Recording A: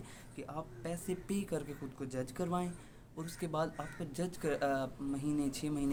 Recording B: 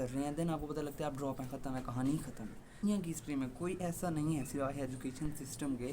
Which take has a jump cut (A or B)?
B